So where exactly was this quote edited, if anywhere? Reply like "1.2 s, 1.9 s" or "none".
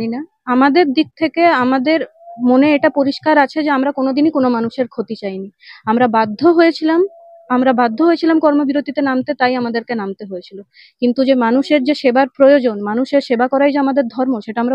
none